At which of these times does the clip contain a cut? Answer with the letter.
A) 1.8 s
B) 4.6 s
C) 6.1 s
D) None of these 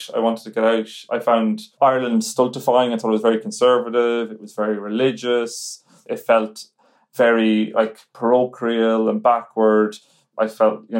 C